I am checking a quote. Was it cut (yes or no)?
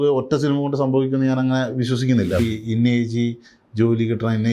yes